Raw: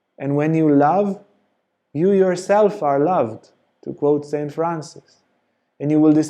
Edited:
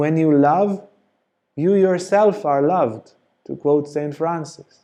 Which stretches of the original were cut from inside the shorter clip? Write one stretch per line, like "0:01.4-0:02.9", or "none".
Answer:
none